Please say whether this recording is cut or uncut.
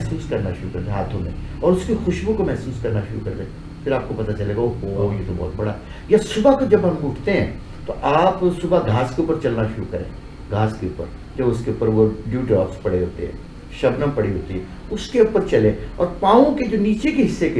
uncut